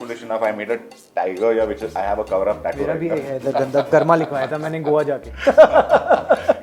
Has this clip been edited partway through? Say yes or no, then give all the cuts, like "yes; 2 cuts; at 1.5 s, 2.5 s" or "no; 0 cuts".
no; 0 cuts